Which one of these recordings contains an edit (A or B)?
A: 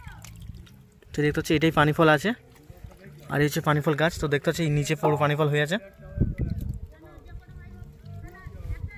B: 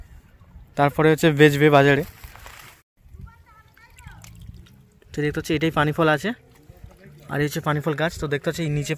B